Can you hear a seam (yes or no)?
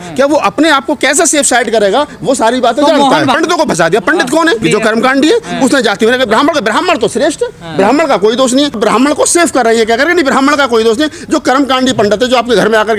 yes